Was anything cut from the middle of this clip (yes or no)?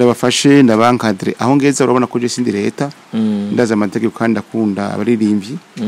no